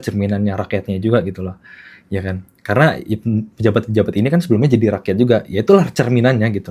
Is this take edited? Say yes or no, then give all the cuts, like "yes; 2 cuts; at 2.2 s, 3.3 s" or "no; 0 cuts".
no; 0 cuts